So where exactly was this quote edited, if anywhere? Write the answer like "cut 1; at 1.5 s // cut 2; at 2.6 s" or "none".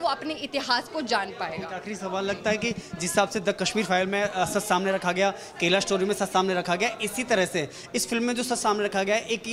none